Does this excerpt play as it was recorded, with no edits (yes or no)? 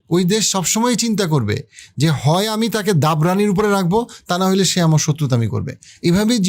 yes